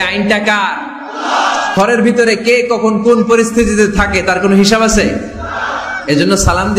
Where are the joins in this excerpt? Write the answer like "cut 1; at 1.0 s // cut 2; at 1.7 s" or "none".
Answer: cut 1; at 1.7 s